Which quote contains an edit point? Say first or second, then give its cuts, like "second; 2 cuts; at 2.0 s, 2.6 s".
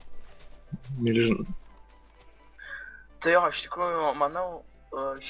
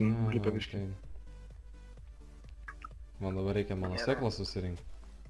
first; 1 cut; at 3.6 s